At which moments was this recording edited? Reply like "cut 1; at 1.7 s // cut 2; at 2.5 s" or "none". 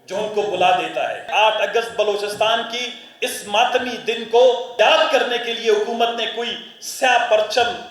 cut 1; at 1.3 s // cut 2; at 4.7 s